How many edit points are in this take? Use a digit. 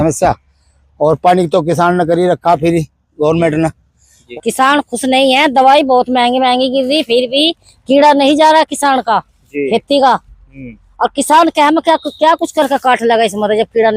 1